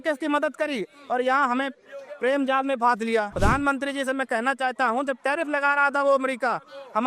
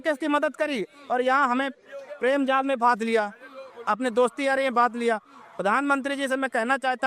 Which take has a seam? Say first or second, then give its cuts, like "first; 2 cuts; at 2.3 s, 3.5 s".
first; 1 cut; at 3.3 s